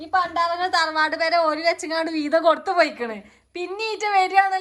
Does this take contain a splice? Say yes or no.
no